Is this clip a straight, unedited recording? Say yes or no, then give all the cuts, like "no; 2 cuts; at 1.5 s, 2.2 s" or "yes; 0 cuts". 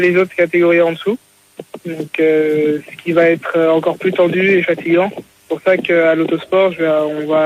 yes; 0 cuts